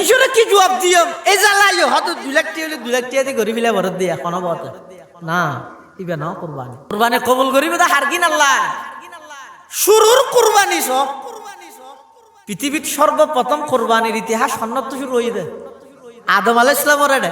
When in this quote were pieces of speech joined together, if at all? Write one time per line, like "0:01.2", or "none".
0:06.9